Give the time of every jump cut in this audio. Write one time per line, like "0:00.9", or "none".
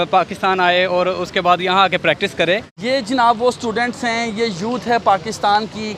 0:02.7